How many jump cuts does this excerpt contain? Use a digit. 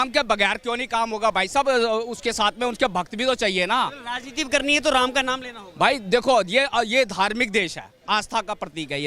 0